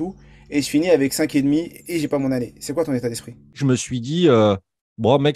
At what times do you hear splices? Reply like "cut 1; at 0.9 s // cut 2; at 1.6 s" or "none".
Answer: cut 1; at 3.6 s